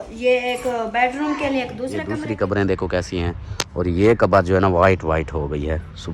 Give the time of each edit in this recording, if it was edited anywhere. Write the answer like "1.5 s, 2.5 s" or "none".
2.1 s